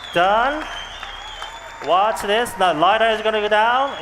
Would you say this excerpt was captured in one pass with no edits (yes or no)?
yes